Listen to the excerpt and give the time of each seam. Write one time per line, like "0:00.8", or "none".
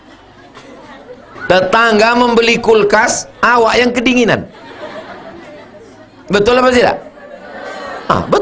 0:01.4